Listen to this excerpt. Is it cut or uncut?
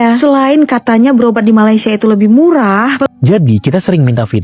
cut